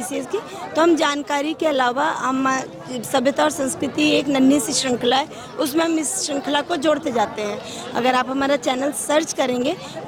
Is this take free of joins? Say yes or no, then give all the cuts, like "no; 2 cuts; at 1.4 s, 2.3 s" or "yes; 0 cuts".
yes; 0 cuts